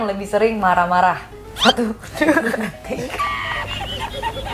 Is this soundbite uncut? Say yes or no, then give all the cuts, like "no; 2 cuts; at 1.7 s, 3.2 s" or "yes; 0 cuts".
yes; 0 cuts